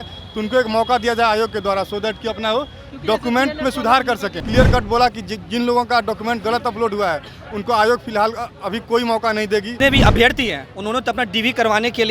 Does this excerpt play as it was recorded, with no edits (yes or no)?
no